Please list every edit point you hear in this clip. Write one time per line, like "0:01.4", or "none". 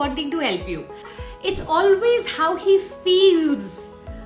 0:01.2